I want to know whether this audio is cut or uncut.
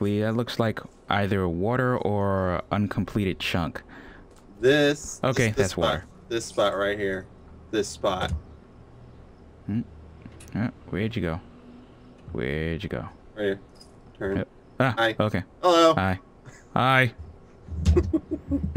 uncut